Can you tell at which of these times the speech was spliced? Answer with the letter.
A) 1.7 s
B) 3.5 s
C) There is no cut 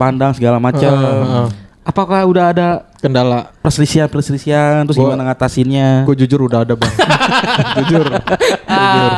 B